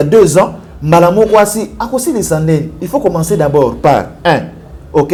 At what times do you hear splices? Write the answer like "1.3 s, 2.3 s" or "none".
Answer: none